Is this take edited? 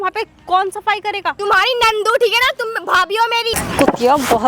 yes; 2 cuts; at 1.4 s, 3.5 s

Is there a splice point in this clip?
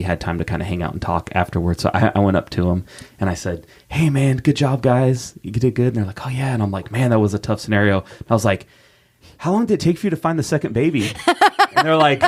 no; 0 cuts

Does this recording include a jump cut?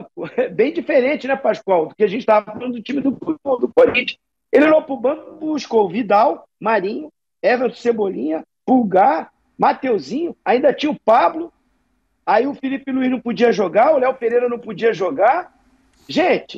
no; 0 cuts

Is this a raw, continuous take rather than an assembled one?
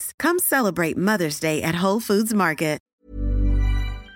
no; 1 cut; at 2.8 s

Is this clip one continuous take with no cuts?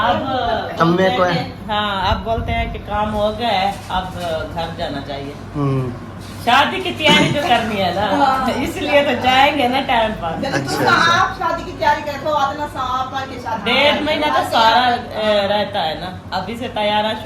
yes; 0 cuts

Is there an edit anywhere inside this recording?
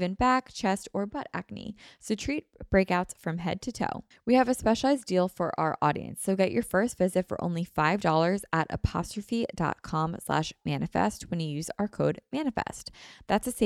yes; 1 cut; at 4.1 s

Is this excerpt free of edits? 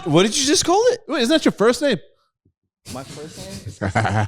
no; 1 cut; at 1.1 s

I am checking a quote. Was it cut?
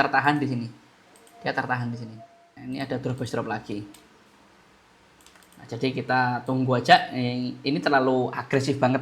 yes; 1 cut; at 2.5 s

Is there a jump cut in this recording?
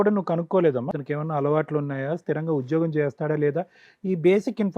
yes; 1 cut; at 0.9 s

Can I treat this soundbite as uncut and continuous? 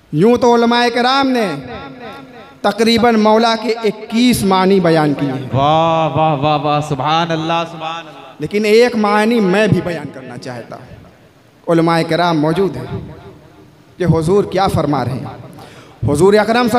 yes; 0 cuts

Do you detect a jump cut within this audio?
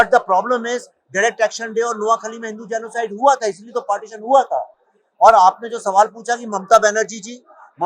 no; 0 cuts

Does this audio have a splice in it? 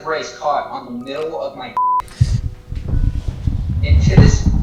no; 0 cuts

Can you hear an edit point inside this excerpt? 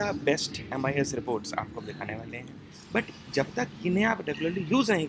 yes; 1 cut; at 2.5 s

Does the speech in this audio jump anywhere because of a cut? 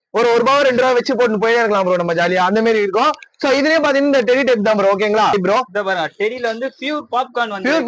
yes; 1 cut; at 5.3 s

